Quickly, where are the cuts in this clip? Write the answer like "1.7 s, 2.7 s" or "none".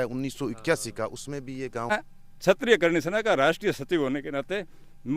1.9 s